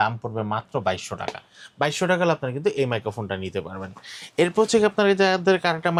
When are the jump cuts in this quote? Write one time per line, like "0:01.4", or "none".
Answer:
none

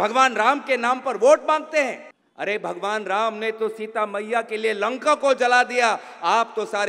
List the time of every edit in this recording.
0:02.1

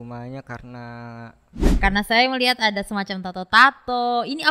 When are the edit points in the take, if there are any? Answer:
0:01.6

